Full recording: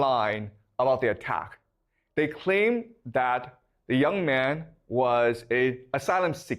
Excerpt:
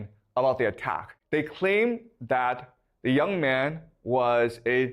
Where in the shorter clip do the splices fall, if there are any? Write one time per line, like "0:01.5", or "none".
0:01.1